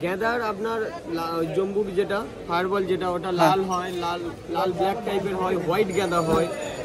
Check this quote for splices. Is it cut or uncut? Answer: uncut